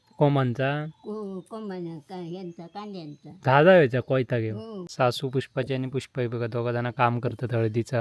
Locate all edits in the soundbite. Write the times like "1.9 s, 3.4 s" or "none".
4.8 s